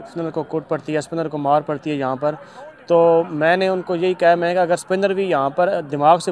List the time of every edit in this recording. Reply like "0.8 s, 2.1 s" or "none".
none